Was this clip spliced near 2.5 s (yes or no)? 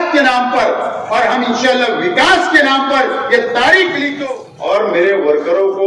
no